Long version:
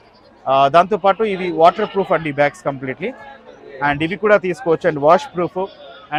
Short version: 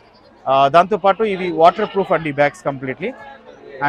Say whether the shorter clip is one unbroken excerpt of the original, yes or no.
yes